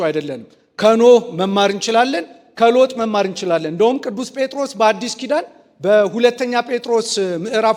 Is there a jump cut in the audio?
no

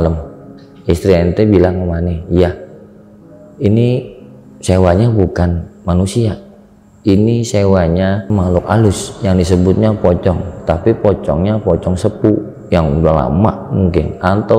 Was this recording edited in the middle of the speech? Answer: no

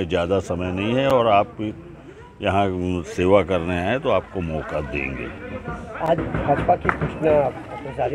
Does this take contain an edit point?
no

